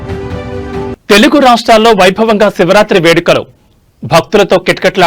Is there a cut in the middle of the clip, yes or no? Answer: no